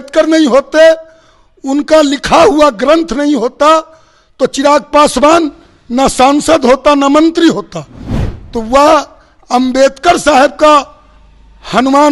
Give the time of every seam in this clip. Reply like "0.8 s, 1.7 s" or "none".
none